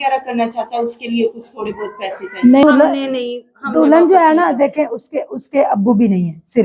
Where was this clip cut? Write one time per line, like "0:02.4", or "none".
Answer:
0:02.6